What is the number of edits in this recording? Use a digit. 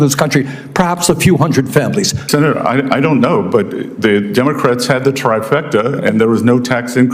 1